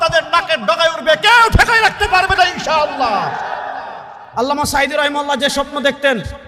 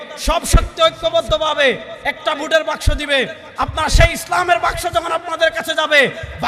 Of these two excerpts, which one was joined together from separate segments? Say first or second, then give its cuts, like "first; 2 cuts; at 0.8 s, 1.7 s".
first; 1 cut; at 4.2 s